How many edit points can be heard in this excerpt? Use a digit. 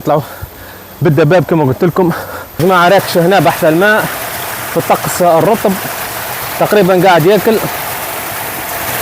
1